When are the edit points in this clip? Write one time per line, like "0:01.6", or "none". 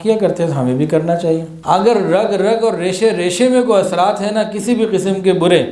0:01.5